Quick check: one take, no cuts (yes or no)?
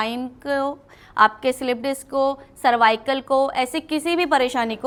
yes